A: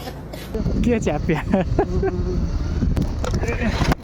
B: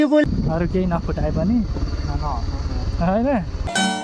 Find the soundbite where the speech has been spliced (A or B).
A